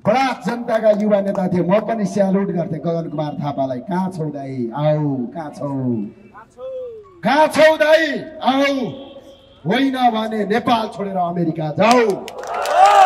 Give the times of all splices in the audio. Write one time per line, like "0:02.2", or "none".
none